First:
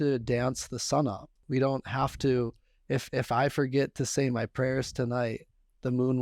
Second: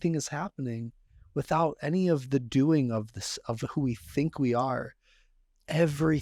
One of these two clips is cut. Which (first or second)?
first